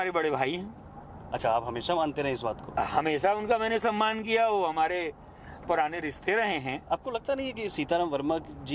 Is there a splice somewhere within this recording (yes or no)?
no